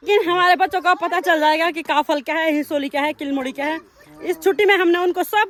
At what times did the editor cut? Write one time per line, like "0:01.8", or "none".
none